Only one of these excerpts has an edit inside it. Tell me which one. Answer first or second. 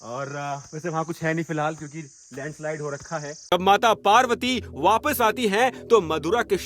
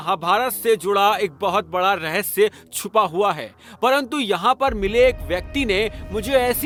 first